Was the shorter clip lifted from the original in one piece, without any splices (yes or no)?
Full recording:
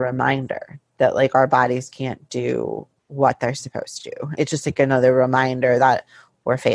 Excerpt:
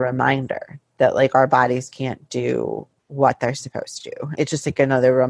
yes